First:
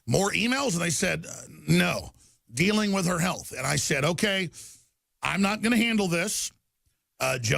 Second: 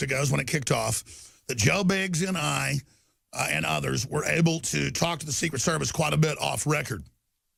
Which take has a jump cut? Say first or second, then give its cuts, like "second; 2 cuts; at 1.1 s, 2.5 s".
first; 1 cut; at 4.0 s